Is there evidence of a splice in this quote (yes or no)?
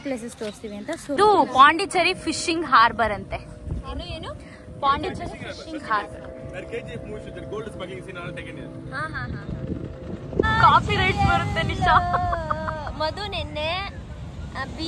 yes